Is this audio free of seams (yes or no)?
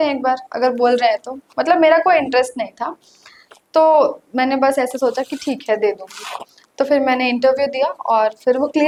yes